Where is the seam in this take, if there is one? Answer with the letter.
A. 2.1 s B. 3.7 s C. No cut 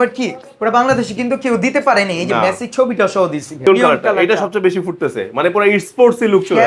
B